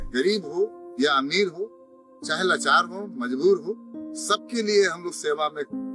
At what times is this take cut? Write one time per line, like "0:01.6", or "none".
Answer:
none